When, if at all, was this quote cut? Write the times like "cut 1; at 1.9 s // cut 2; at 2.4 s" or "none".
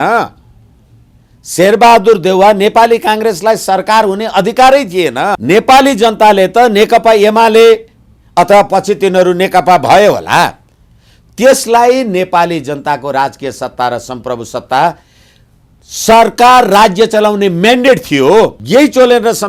cut 1; at 5.4 s // cut 2; at 18.6 s